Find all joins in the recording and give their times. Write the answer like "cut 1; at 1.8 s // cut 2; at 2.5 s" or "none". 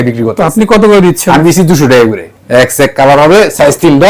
cut 1; at 2.3 s